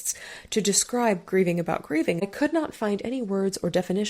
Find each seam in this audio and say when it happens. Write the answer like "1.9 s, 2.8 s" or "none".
2.3 s